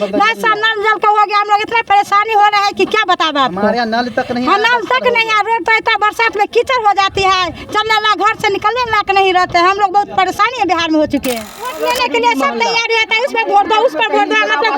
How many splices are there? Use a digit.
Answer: 1